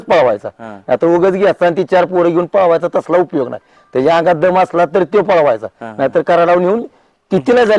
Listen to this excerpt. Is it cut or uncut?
uncut